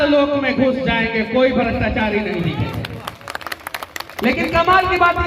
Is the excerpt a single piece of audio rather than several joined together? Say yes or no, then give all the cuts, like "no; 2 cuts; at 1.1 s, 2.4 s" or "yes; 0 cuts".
yes; 0 cuts